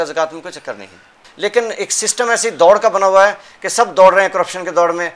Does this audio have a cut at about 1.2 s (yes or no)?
yes